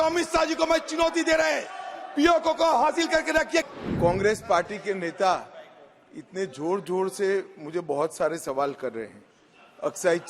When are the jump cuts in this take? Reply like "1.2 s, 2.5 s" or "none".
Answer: 3.7 s